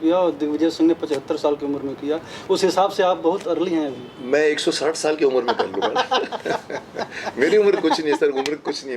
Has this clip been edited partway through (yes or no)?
no